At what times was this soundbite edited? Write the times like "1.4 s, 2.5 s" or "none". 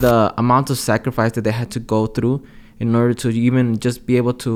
none

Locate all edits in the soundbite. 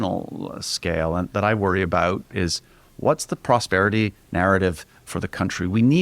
2.3 s

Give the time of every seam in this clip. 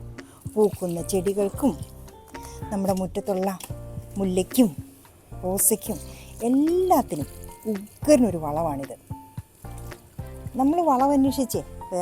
9.0 s, 10.5 s

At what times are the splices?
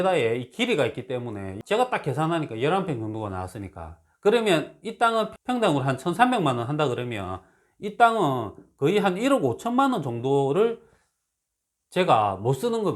1.5 s, 5.3 s

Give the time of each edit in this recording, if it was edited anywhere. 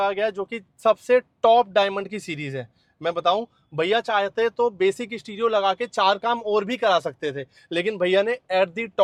none

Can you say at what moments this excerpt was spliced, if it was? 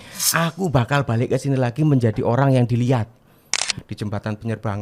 3.6 s

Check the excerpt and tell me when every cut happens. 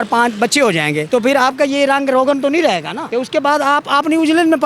3.1 s

